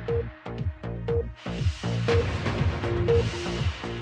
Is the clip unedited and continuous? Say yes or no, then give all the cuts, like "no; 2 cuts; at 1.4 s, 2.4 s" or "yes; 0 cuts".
yes; 0 cuts